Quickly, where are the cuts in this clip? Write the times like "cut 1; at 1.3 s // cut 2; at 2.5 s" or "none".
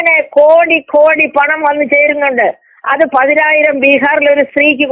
none